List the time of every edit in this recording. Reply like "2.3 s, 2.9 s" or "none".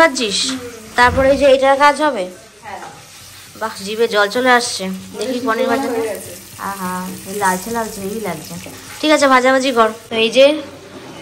none